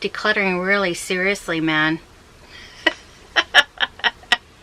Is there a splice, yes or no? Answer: no